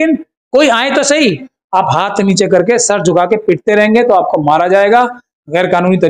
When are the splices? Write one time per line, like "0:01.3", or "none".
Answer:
0:01.5